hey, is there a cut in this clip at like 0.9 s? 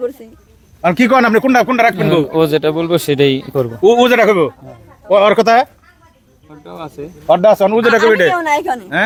no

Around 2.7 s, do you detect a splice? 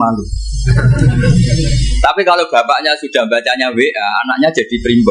no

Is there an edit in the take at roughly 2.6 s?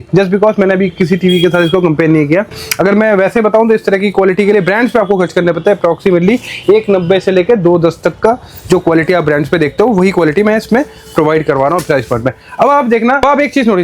no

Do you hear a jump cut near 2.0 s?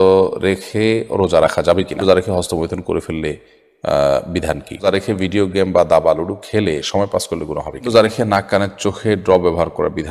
yes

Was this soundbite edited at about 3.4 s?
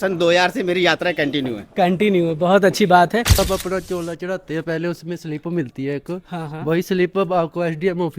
yes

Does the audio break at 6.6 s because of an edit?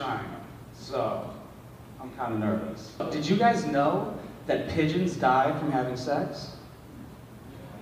no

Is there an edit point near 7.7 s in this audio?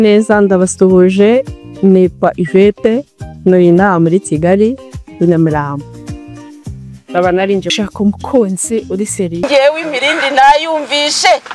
yes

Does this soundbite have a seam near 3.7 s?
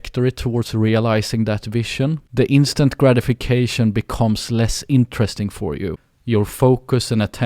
no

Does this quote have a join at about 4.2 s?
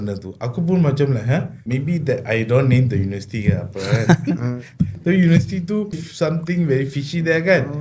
no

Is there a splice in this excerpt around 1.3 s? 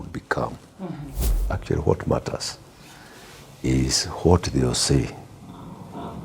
yes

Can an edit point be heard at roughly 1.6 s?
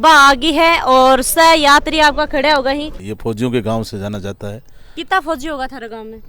no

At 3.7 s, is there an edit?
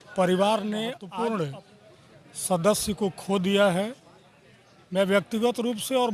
no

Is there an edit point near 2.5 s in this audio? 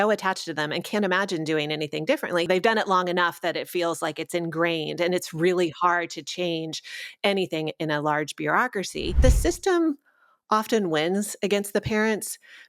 yes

